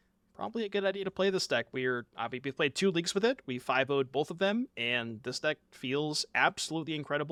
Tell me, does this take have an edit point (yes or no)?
no